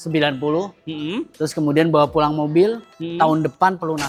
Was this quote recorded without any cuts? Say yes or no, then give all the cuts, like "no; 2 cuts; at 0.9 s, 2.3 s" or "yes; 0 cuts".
yes; 0 cuts